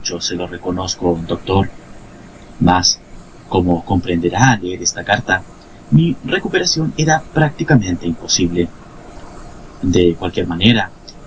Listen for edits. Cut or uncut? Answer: uncut